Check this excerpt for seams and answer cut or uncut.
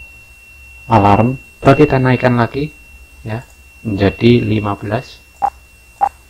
cut